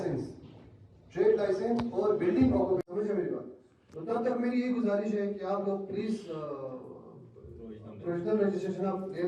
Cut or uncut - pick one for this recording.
cut